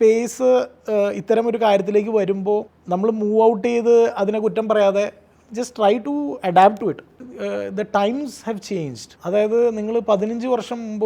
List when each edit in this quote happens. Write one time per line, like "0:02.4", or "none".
0:02.7
0:07.3
0:09.0